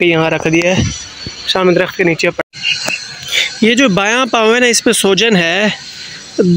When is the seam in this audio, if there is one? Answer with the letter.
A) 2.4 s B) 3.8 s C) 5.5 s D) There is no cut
A